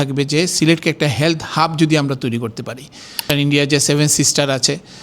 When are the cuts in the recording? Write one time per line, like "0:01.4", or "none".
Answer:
0:03.2